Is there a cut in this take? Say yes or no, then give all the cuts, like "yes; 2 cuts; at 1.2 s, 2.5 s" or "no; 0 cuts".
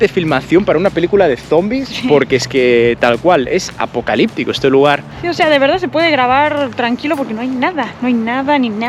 no; 0 cuts